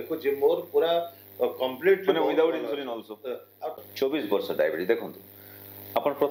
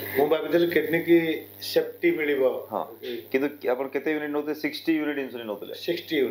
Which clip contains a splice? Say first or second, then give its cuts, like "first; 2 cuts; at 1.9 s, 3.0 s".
first; 1 cut; at 3.9 s